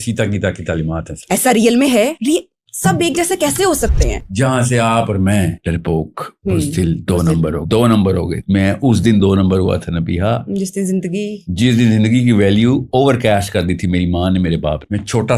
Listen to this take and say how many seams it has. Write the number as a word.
one